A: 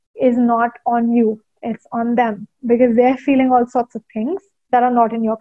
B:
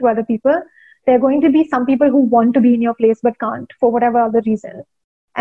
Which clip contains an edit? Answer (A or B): A